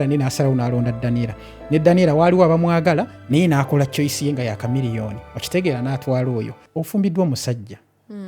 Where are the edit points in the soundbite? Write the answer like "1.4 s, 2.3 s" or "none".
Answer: 6.6 s